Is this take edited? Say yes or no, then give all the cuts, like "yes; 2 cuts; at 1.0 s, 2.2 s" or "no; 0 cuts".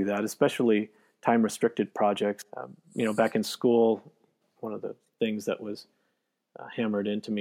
yes; 2 cuts; at 2.4 s, 4.5 s